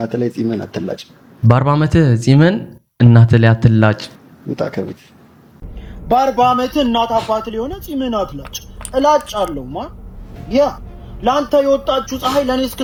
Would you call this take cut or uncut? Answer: uncut